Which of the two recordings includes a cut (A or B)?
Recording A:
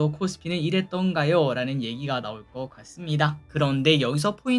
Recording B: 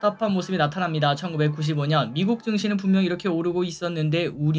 A